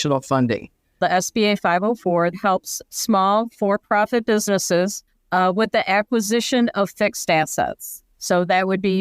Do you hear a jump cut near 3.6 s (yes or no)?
no